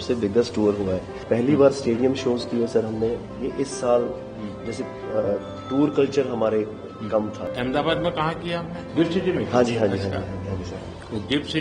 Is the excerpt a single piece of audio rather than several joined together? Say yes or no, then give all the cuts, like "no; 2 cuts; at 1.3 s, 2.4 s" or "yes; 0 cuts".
no; 2 cuts; at 1.1 s, 7.4 s